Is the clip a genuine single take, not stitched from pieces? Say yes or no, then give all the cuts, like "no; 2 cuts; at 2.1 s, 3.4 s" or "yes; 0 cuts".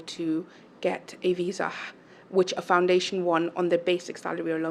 yes; 0 cuts